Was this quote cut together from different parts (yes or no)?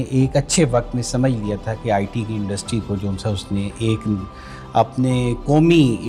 no